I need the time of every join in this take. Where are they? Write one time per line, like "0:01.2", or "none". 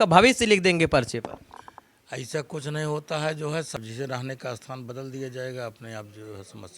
0:03.7